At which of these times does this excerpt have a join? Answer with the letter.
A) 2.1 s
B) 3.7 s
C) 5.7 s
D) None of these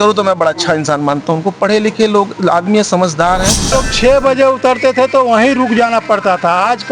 B